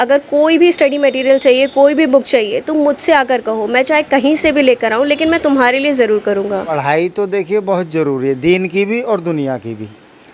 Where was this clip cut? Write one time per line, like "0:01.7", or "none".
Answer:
0:06.7